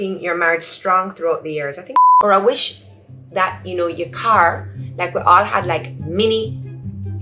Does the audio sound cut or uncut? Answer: cut